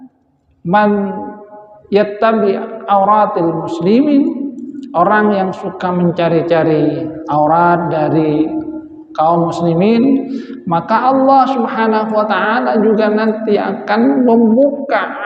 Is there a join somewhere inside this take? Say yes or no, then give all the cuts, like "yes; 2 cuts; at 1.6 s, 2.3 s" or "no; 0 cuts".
no; 0 cuts